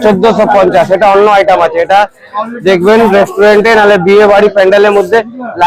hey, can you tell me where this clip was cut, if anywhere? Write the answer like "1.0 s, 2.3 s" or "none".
none